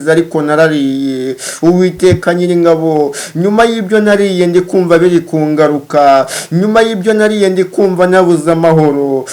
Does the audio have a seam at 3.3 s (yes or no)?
no